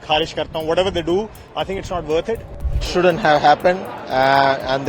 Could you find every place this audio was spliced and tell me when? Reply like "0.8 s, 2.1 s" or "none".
2.8 s